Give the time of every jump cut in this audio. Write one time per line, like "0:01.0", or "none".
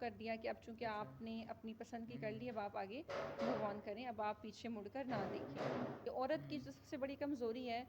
0:06.0